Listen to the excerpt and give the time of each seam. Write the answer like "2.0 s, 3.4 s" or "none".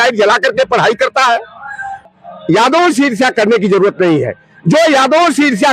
2.0 s